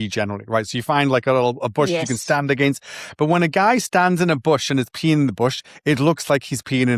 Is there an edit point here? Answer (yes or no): no